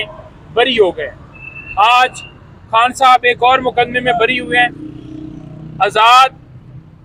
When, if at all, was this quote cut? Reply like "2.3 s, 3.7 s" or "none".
none